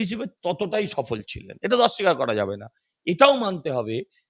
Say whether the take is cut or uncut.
uncut